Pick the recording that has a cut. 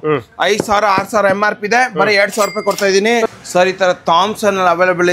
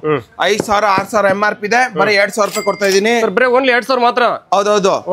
first; 1 cut; at 3.4 s

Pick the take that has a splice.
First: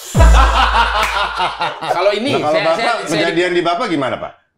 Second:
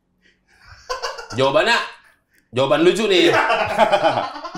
first; 1 cut; at 1.8 s

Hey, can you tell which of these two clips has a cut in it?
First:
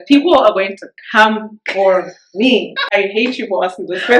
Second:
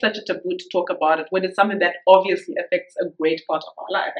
first; 1 cut; at 2.9 s

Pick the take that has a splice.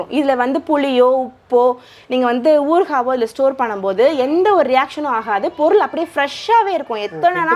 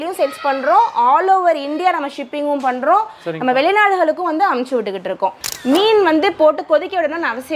second; 1 cut; at 5.4 s

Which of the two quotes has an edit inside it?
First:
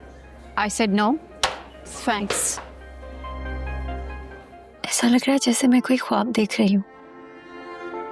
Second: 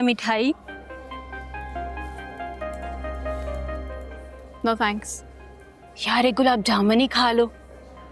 first; 1 cut; at 4.6 s

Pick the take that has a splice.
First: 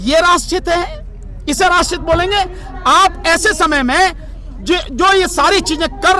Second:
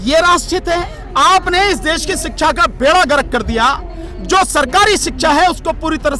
second; 1 cut; at 1.0 s

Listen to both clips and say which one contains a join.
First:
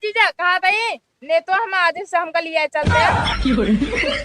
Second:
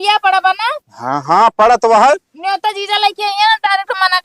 first; 1 cut; at 2.9 s

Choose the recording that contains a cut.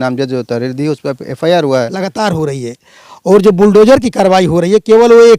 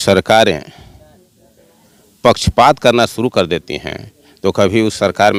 first; 1 cut; at 2.1 s

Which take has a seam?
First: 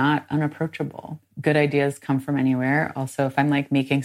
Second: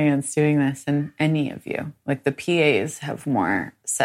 first; 1 cut; at 1.3 s

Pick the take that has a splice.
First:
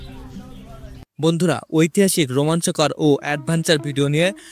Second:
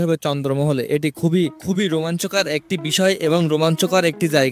first; 1 cut; at 1.1 s

